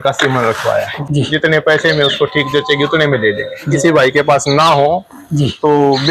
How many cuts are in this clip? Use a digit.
2